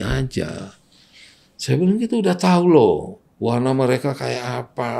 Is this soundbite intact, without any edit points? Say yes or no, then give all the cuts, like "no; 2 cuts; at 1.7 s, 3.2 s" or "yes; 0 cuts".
yes; 0 cuts